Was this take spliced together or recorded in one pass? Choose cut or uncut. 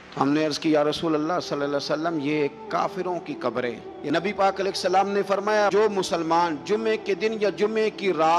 cut